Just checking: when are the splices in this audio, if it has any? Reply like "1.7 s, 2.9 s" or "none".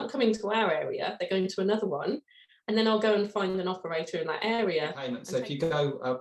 5.2 s